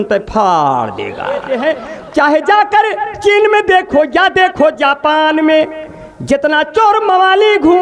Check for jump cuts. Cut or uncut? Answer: cut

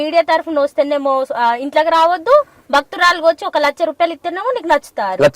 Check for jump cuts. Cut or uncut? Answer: uncut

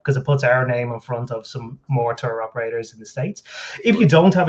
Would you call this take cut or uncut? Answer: uncut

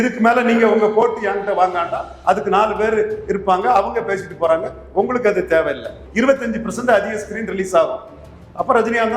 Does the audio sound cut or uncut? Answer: cut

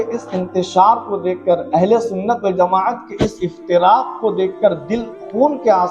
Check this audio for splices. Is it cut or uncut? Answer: uncut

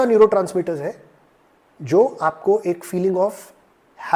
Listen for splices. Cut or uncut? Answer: uncut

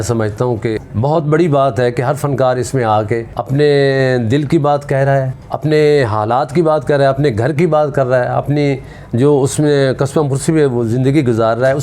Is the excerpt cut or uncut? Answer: cut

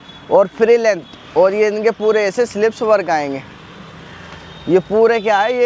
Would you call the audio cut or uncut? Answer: uncut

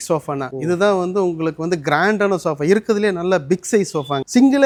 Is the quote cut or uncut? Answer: uncut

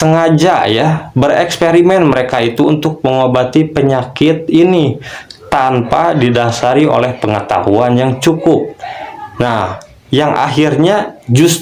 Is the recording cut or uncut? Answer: uncut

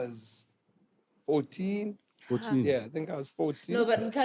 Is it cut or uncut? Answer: uncut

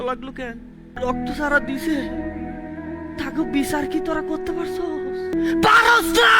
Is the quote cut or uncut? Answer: cut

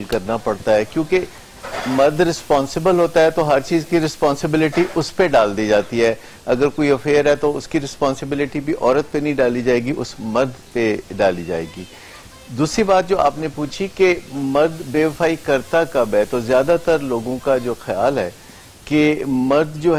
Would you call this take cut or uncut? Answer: uncut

